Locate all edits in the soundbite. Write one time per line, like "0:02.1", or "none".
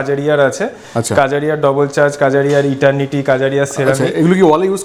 none